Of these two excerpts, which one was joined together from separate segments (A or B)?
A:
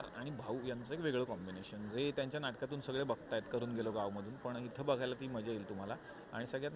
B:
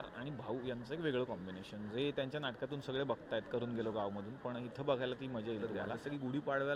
B